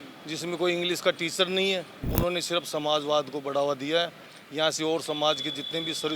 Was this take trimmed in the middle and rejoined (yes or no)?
yes